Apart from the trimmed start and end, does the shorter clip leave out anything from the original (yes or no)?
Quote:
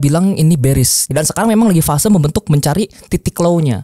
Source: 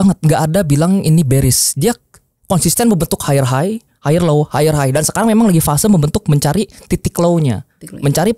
yes